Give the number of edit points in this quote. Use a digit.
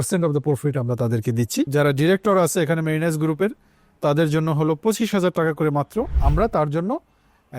2